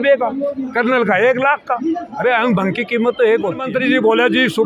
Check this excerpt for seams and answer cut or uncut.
cut